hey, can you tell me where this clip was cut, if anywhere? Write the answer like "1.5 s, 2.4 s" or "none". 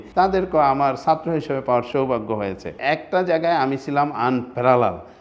2.7 s